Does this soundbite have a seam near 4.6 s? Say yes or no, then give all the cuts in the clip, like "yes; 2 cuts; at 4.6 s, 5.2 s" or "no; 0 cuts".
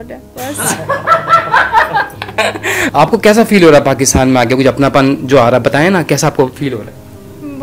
no; 1 cut; at 2.7 s